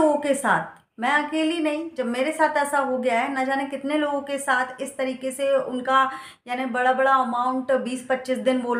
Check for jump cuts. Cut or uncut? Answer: uncut